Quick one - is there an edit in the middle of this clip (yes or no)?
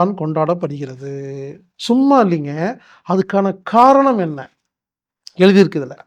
yes